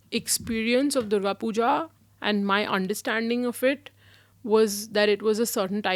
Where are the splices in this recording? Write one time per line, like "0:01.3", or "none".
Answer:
none